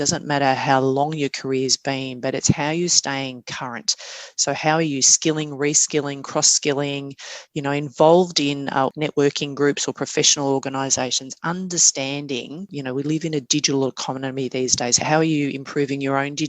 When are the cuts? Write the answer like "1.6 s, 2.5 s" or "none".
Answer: 8.9 s, 12.7 s, 15.0 s

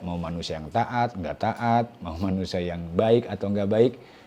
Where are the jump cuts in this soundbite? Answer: none

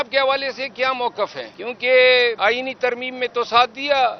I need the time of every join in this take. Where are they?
1.5 s, 2.4 s

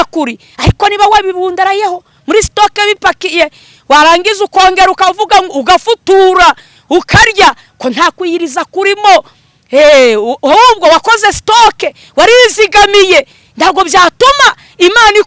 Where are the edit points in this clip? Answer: none

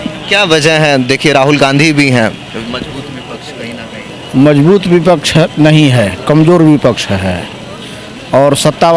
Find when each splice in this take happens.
none

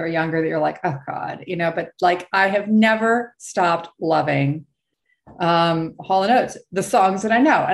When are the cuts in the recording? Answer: none

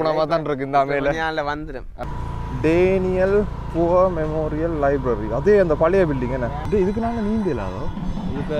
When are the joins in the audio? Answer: 1.9 s, 6.6 s

